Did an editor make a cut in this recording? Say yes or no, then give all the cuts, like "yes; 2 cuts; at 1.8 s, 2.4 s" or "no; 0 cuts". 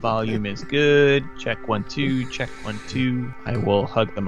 yes; 1 cut; at 3.3 s